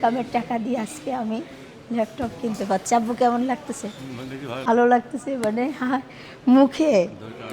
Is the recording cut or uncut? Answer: cut